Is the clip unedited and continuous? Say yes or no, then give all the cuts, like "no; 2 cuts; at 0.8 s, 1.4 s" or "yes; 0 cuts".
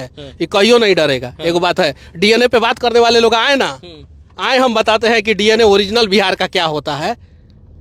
yes; 0 cuts